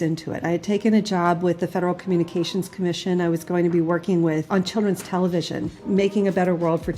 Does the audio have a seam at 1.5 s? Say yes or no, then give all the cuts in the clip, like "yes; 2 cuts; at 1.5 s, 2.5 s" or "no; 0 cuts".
no; 2 cuts; at 4.5 s, 5.8 s